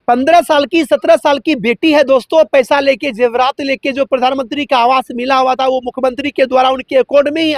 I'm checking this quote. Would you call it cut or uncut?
uncut